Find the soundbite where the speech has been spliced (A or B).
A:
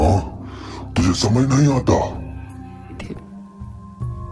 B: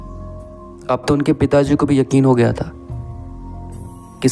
A